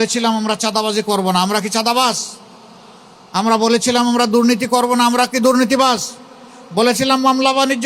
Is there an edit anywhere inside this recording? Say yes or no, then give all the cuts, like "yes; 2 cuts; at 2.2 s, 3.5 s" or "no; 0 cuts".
no; 0 cuts